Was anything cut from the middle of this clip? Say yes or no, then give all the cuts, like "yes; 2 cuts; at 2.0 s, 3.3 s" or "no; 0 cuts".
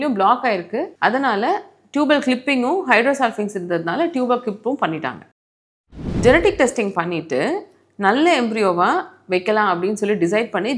yes; 1 cut; at 0.9 s